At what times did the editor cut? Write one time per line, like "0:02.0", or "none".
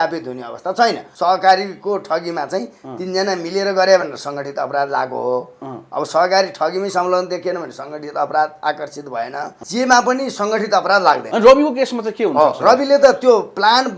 0:01.1
0:09.6
0:11.3